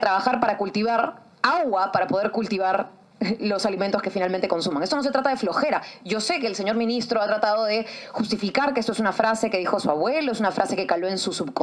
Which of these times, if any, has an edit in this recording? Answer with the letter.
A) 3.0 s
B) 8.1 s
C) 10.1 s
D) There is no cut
D